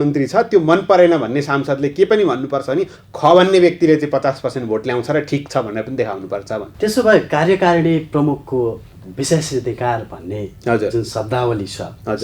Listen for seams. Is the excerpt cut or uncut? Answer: cut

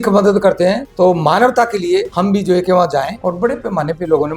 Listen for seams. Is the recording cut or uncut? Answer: cut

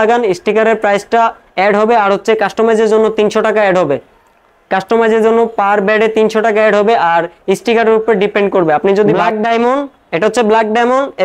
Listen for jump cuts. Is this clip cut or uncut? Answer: cut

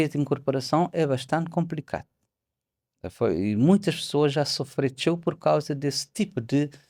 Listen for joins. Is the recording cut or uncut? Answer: uncut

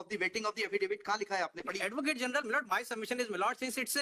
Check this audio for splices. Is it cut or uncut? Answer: uncut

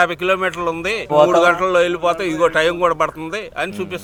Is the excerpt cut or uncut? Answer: uncut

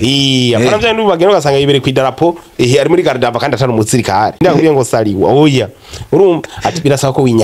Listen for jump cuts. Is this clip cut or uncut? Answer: cut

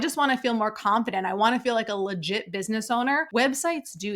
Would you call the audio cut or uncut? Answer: cut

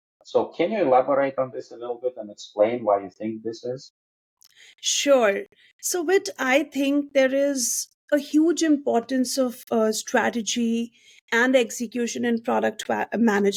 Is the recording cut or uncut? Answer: uncut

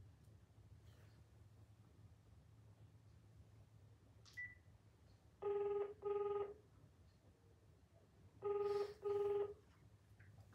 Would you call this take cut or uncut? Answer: uncut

